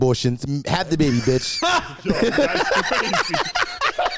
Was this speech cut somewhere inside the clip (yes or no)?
no